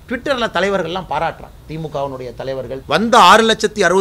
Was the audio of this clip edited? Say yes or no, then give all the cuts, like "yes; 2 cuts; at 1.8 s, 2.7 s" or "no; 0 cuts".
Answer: yes; 1 cut; at 2.8 s